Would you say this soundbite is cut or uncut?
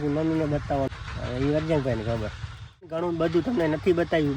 cut